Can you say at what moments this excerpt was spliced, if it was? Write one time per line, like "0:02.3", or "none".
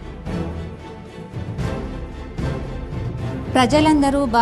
0:01.2